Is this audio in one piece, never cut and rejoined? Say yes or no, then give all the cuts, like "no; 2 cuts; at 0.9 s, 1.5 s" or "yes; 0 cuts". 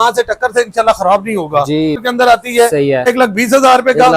no; 2 cuts; at 2.0 s, 3.1 s